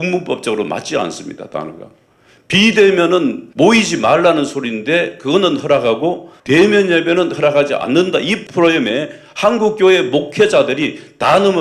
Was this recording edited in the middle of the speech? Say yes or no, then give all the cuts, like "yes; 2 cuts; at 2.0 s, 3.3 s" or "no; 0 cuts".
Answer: yes; 1 cut; at 8.4 s